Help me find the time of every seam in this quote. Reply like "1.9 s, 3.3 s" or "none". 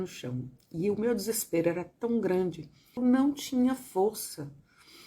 3.0 s